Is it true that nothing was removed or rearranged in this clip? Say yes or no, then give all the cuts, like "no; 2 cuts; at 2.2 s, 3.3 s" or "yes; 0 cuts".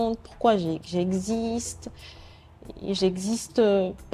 yes; 0 cuts